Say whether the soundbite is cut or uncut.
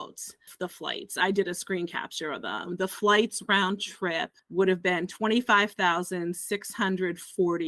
uncut